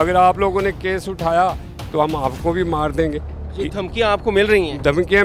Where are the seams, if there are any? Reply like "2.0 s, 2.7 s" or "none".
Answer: none